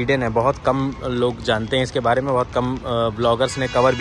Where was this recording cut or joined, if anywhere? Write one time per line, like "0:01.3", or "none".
none